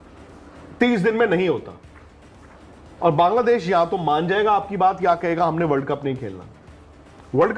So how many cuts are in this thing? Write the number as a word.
zero